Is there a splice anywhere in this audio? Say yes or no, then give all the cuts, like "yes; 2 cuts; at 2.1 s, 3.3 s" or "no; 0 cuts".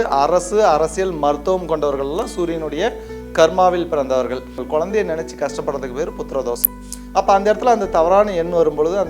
yes; 1 cut; at 4.5 s